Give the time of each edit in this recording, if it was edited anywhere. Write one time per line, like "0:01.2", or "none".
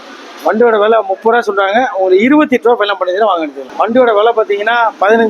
0:03.6